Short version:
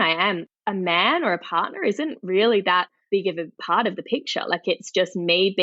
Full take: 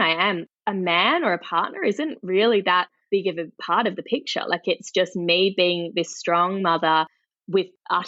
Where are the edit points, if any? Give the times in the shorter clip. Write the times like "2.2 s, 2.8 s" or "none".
none

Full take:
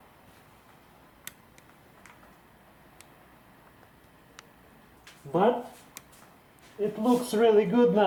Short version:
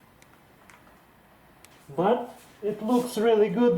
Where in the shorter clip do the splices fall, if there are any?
1.8 s, 2.4 s

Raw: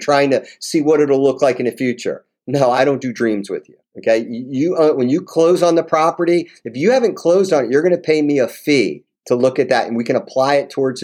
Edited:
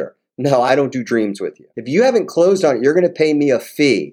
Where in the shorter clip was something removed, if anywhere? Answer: 1.7 s

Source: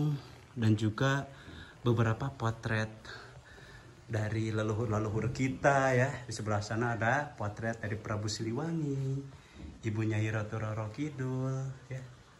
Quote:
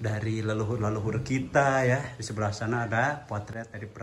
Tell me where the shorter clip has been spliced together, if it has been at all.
none

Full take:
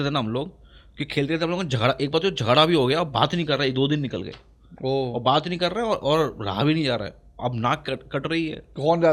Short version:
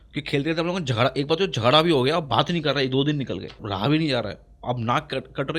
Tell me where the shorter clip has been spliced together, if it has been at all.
3.6 s

